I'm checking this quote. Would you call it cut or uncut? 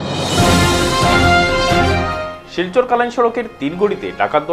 cut